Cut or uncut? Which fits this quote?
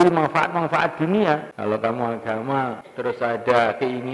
cut